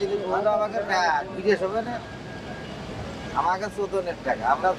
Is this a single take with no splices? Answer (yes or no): yes